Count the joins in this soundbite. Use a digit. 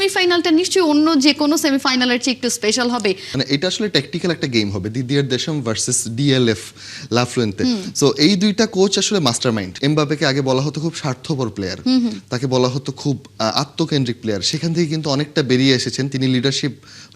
2